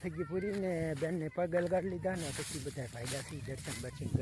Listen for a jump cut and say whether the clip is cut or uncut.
uncut